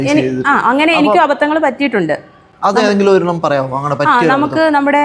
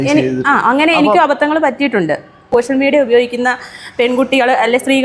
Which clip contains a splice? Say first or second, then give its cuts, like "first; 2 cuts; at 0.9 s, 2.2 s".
second; 1 cut; at 2.5 s